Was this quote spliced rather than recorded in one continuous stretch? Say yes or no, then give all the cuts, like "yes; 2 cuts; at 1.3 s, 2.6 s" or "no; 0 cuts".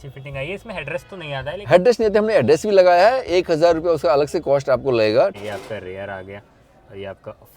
yes; 1 cut; at 5.3 s